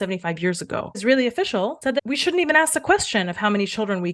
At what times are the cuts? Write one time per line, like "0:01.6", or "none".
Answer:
0:01.0
0:02.0